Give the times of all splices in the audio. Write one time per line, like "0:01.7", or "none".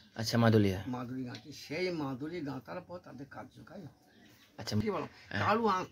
0:04.8